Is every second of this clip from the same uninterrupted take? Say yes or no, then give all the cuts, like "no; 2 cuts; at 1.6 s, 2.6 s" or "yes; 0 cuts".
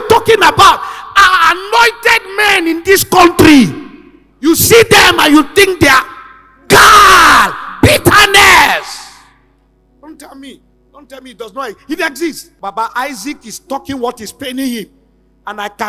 yes; 0 cuts